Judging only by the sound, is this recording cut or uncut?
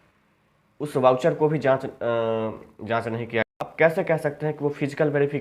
cut